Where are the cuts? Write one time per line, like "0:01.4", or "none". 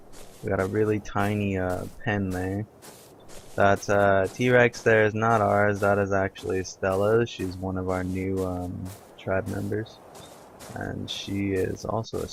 none